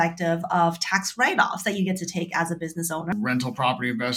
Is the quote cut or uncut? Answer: cut